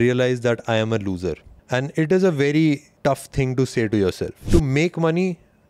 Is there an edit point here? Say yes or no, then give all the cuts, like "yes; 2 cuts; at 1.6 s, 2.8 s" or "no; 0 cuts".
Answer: yes; 3 cuts; at 1.5 s, 2.9 s, 4.3 s